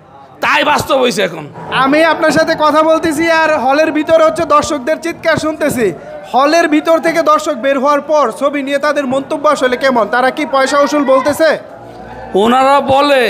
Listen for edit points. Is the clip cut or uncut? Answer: cut